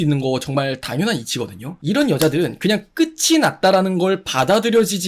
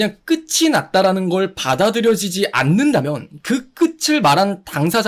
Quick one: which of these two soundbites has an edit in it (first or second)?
first